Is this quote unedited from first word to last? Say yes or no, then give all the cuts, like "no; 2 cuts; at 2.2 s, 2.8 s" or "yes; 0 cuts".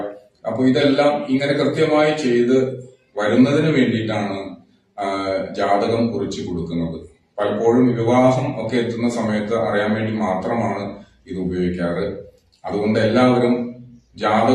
no; 1 cut; at 10.5 s